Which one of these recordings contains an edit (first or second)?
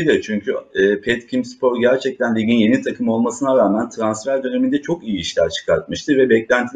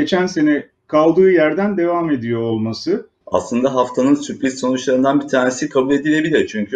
second